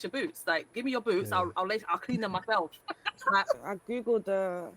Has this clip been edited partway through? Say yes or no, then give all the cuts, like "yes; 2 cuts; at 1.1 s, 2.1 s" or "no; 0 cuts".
yes; 1 cut; at 3.6 s